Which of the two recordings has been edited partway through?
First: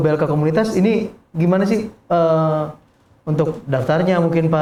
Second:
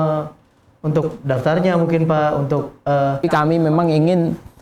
second; 1 cut; at 3.2 s

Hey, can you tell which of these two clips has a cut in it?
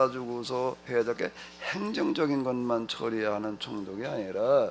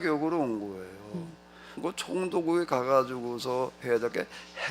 second; 1 cut; at 1.8 s

